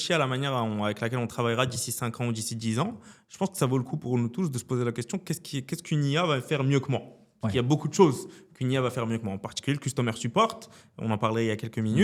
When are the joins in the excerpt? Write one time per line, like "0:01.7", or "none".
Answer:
none